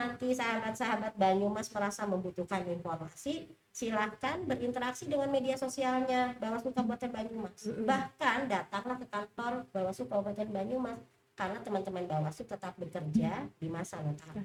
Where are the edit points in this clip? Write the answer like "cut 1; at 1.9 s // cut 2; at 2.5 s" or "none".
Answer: none